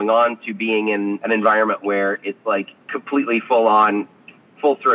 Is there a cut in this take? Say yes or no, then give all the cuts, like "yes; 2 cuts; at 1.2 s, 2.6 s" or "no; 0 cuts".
yes; 2 cuts; at 1.2 s, 2.9 s